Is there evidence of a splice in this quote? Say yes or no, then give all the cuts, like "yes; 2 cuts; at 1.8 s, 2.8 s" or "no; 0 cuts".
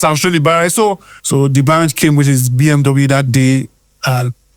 yes; 1 cut; at 1.1 s